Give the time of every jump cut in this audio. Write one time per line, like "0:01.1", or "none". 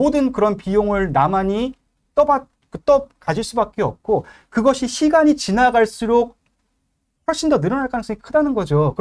none